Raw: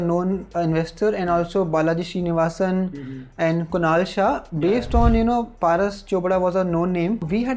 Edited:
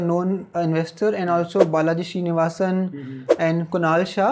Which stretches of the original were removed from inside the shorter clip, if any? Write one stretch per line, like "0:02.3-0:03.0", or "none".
none